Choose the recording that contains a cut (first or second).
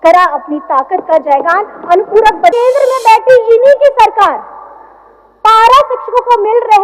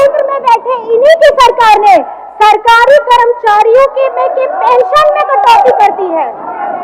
first